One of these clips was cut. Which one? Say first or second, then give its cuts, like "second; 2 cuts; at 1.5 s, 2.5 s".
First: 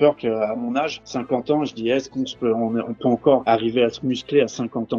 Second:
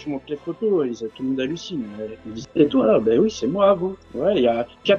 first; 1 cut; at 1.0 s